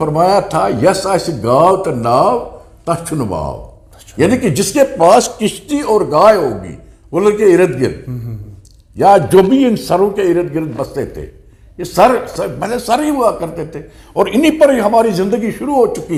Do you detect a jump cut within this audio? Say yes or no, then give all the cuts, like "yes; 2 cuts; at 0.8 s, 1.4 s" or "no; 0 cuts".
no; 0 cuts